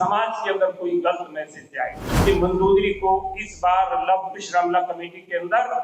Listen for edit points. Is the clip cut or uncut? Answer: cut